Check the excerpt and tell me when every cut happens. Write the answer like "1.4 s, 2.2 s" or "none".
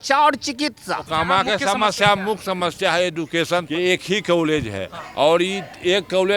1.1 s, 3.7 s